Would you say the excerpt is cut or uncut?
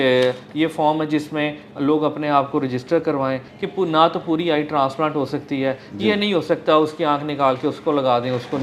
cut